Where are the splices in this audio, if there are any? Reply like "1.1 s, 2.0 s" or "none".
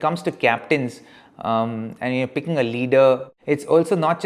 3.3 s